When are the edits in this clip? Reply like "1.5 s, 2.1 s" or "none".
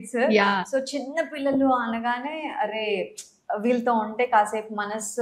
none